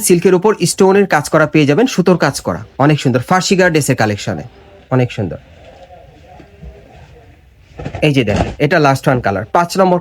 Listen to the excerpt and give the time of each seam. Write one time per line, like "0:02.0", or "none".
none